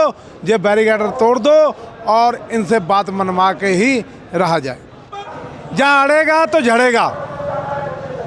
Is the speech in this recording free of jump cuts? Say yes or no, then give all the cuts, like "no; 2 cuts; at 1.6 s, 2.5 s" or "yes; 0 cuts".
no; 1 cut; at 5.3 s